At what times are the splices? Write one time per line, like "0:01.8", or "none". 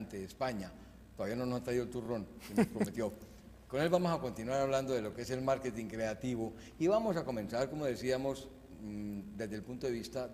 0:02.4